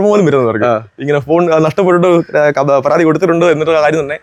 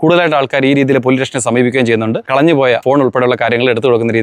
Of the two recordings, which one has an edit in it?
second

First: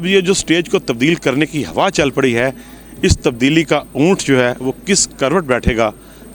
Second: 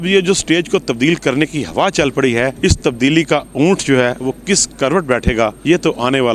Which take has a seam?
second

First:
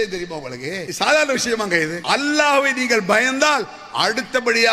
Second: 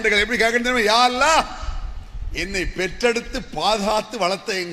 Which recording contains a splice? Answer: first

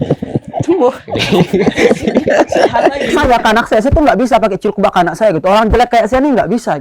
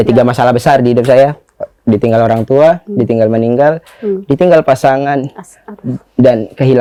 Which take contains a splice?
first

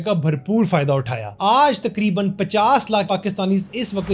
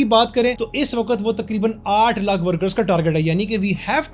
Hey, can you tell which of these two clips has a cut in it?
first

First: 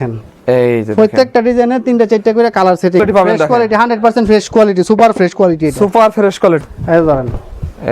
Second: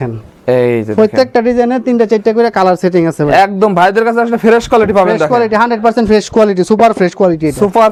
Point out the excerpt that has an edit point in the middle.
first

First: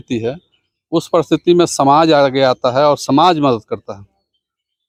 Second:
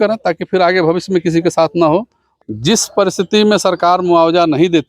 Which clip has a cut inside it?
second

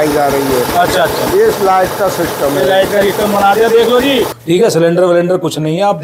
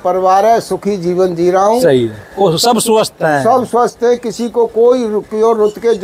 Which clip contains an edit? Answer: first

